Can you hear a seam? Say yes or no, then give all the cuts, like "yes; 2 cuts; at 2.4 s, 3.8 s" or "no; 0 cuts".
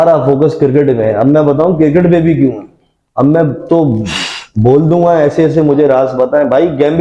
no; 0 cuts